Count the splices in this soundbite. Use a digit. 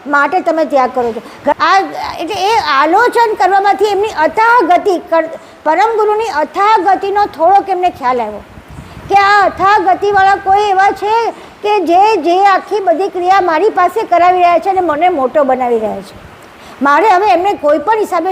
1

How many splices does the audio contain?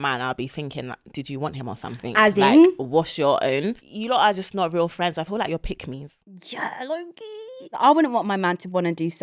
2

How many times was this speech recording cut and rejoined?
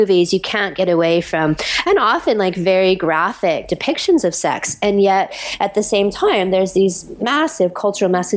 0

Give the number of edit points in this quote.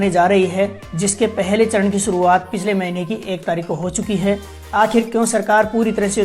1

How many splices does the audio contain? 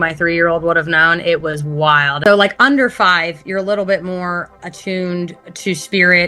1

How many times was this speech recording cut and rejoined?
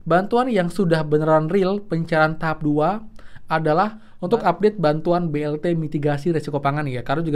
1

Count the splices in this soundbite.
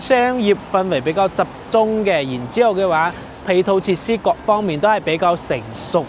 0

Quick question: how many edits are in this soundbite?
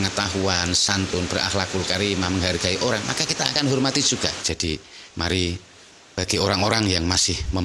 1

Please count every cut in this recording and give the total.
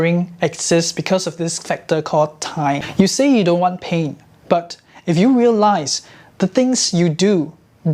1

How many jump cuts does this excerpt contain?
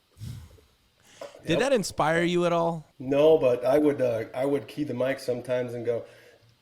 1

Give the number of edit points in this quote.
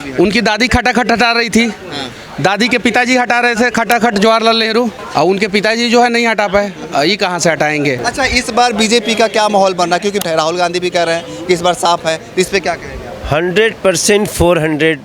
3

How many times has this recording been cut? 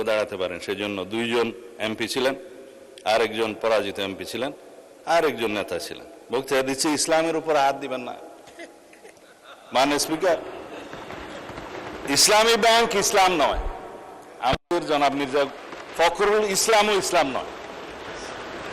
0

